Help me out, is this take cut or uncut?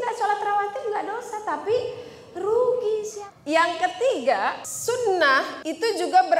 cut